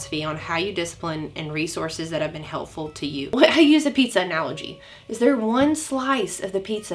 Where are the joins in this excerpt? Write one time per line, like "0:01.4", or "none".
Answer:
0:03.3